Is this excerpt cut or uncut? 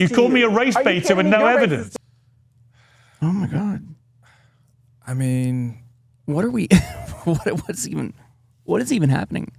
uncut